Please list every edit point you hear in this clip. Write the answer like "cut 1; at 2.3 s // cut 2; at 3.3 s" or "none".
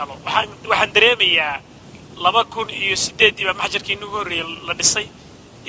none